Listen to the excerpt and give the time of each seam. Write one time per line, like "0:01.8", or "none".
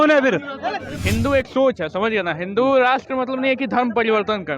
0:00.9